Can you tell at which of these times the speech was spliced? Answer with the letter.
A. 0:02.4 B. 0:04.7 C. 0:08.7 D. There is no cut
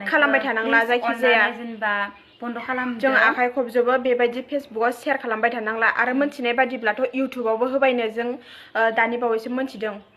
D